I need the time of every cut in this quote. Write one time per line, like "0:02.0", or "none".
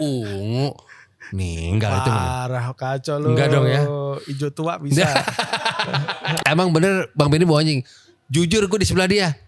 0:06.4